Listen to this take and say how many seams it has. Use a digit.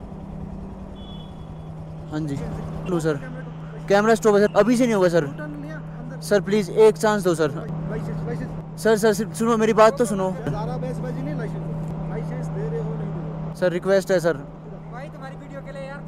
3